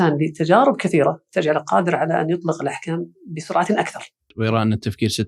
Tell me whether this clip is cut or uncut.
cut